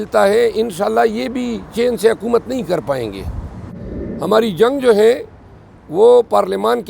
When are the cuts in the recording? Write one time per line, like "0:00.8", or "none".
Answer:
0:03.6